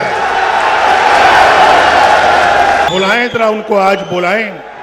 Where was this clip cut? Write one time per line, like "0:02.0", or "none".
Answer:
0:02.9